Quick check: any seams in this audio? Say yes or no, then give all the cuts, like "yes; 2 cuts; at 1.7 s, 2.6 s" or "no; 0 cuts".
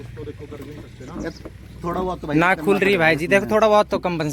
no; 0 cuts